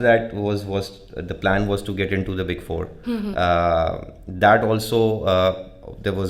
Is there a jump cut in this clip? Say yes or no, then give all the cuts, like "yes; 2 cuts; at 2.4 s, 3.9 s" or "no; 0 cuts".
no; 0 cuts